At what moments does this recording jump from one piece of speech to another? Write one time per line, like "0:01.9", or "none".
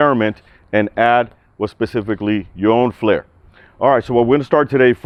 none

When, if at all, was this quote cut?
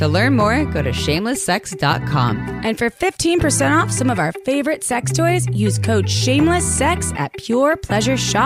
none

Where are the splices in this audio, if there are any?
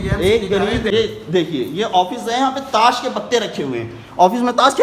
0:00.9

